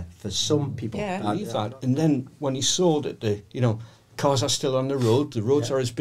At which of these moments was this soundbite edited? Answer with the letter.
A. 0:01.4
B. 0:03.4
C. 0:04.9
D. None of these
A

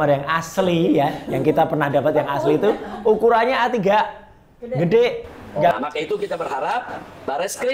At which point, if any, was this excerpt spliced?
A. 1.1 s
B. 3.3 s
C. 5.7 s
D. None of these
C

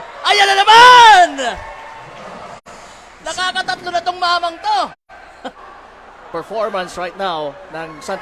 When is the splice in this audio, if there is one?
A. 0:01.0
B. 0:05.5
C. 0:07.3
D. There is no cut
B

